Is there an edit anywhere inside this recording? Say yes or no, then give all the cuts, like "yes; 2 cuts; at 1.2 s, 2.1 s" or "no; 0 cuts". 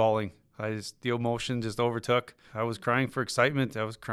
yes; 1 cut; at 2.4 s